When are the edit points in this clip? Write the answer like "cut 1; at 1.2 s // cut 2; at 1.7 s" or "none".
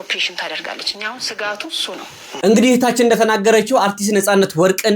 cut 1; at 2.3 s